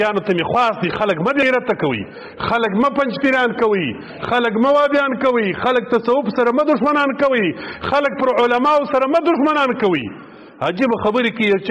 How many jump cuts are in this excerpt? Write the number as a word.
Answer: one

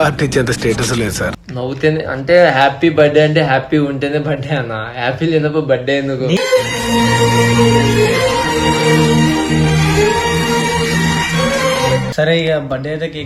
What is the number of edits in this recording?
two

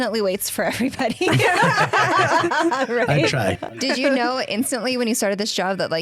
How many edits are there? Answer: one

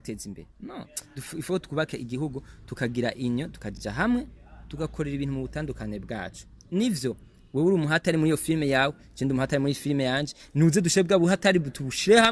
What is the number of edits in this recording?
zero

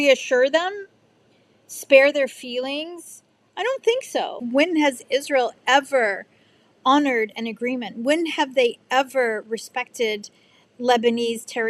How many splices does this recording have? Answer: one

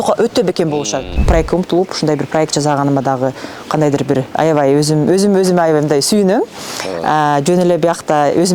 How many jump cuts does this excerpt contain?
one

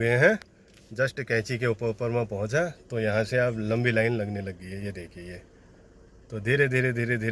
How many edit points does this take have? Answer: zero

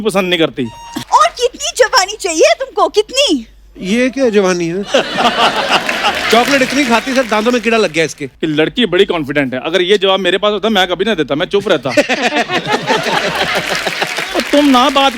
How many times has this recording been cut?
two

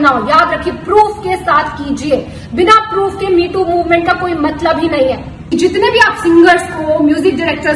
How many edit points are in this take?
one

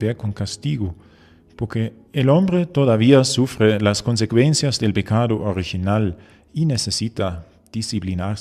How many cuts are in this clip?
one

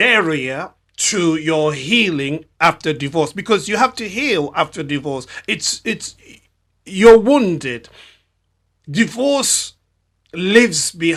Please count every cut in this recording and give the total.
zero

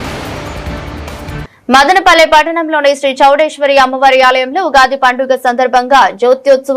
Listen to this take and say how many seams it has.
one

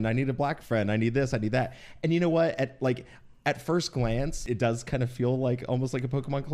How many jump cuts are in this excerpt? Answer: one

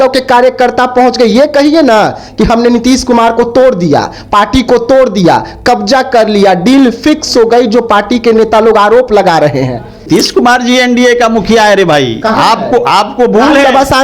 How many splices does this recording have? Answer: one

